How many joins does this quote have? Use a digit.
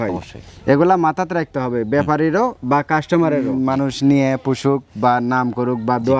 1